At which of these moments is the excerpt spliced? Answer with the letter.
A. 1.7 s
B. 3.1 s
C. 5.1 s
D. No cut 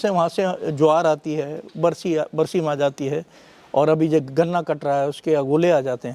D